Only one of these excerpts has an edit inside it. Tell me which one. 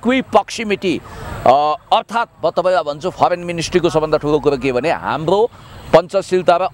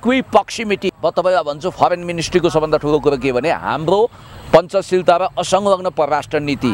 second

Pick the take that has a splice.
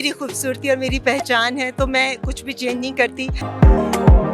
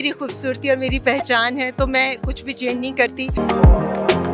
first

